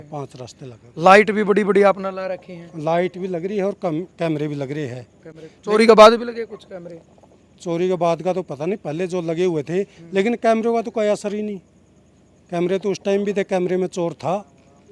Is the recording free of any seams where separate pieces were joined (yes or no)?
yes